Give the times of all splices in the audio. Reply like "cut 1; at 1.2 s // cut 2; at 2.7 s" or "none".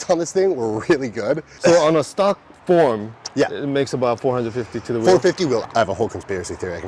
cut 1; at 1.5 s // cut 2; at 2.5 s // cut 3; at 5.6 s